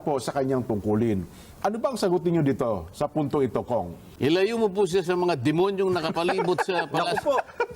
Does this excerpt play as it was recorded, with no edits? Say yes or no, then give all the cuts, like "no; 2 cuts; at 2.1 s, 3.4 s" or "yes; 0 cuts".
no; 1 cut; at 4.1 s